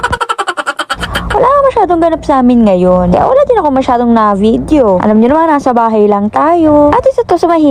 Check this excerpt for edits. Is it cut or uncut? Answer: uncut